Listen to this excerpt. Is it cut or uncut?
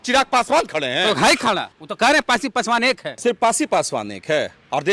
cut